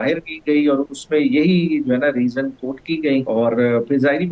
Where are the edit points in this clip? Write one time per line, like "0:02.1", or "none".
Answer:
0:03.2